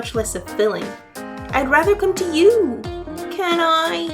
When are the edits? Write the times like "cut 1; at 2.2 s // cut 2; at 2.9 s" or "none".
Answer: cut 1; at 1.0 s